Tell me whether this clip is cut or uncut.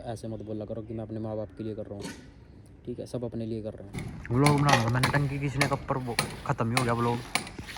uncut